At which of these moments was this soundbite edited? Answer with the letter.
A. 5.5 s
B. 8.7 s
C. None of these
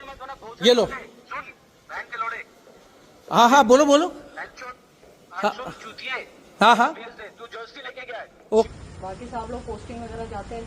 B